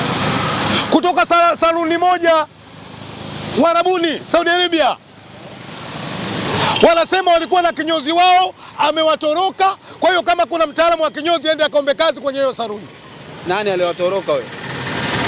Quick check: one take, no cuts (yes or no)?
yes